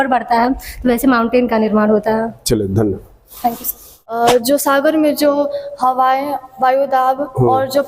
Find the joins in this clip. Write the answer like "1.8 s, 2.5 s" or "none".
4.1 s